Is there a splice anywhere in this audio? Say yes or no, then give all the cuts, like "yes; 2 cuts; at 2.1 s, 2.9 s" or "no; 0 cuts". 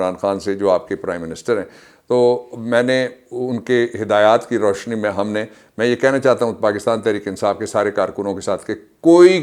no; 0 cuts